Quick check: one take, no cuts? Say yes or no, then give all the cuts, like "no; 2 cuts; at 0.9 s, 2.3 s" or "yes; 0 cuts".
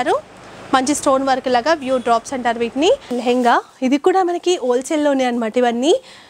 no; 1 cut; at 3.2 s